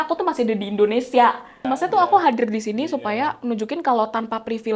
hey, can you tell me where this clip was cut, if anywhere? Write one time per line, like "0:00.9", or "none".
0:01.8